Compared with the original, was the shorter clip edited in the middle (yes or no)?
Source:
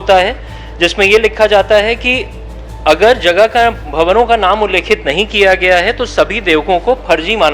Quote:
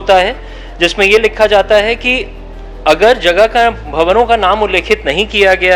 no